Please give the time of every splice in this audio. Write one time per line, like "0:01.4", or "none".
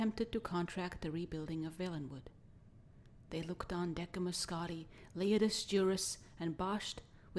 0:03.8

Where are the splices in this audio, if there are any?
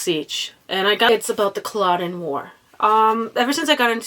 0:01.1

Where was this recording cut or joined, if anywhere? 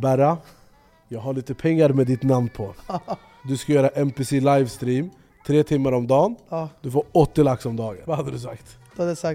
0:03.3
0:07.9

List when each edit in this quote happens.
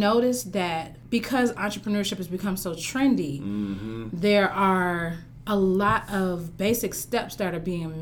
0:00.9

